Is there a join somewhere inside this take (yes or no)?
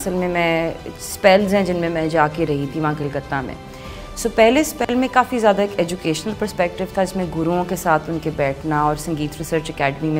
no